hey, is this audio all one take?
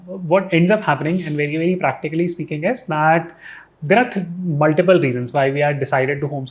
yes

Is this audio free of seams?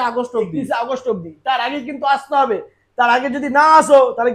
yes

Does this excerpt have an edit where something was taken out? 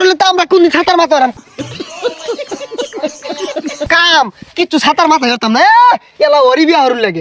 no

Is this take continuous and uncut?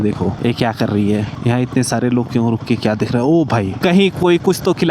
no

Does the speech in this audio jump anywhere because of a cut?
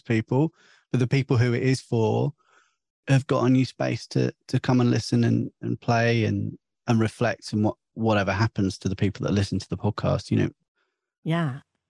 yes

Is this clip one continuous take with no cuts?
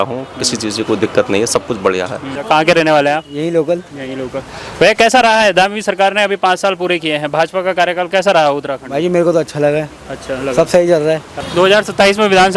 no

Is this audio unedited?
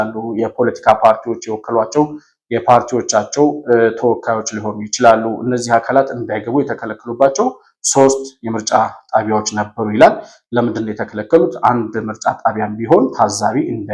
yes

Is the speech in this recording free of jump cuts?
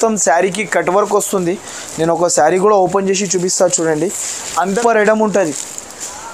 no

